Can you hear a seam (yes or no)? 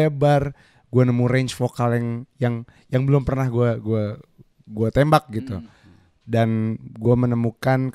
no